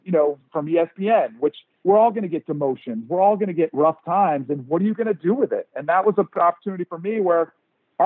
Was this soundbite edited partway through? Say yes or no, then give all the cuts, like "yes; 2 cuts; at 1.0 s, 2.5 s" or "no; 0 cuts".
yes; 1 cut; at 6.3 s